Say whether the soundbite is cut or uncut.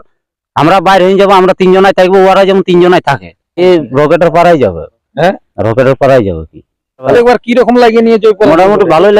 cut